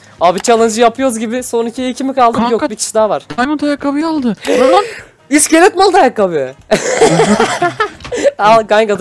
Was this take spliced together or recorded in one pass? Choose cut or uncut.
uncut